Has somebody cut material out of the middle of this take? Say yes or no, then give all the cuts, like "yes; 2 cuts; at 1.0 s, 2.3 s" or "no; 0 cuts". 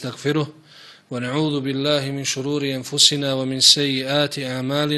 no; 0 cuts